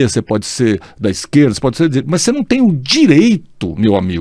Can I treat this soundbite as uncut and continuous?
yes; 0 cuts

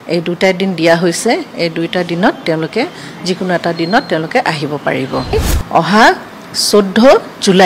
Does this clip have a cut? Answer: yes; 1 cut; at 5.3 s

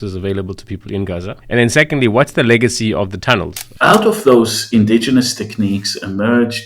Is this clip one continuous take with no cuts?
no; 2 cuts; at 1.3 s, 3.6 s

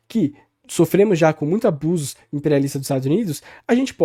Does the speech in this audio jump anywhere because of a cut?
no; 0 cuts

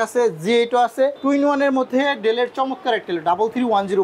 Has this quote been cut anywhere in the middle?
yes; 1 cut; at 1.2 s

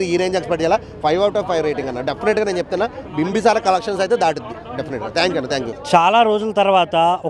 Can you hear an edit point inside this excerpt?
no; 0 cuts

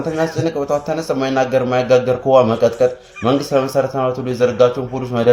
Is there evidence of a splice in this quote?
no; 0 cuts

